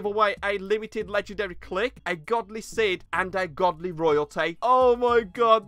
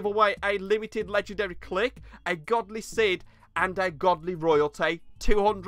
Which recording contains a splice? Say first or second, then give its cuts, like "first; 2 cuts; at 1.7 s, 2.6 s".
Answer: first; 3 cuts; at 2.0 s, 3.1 s, 4.6 s